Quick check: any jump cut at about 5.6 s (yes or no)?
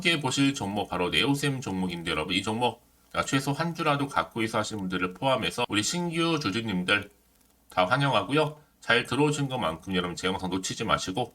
yes